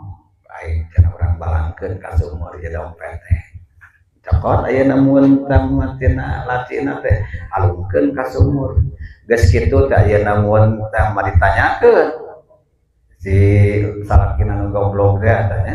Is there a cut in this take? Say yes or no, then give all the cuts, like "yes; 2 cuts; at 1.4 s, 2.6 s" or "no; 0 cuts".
no; 0 cuts